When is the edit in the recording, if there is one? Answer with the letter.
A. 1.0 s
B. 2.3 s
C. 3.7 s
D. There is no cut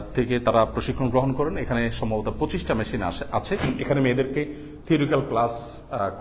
C